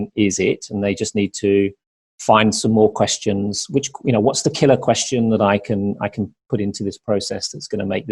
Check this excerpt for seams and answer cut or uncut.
uncut